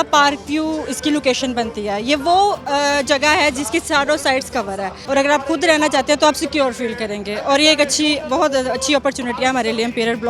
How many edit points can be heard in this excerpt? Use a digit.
1